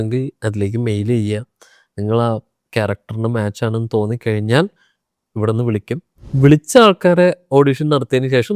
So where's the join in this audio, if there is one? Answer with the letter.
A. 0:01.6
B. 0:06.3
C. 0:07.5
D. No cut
B